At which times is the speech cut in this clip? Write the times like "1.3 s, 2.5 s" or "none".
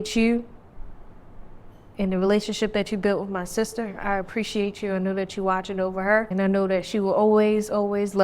6.3 s